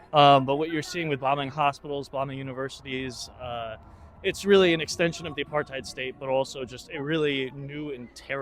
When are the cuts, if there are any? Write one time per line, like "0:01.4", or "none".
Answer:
none